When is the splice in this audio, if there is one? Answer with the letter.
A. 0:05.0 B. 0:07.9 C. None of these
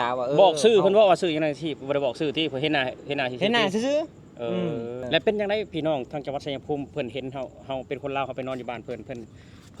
A